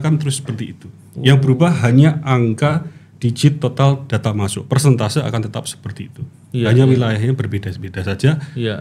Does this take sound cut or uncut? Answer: uncut